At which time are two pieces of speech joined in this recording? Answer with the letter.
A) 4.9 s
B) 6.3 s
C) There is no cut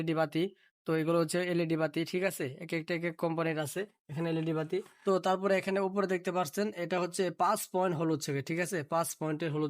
A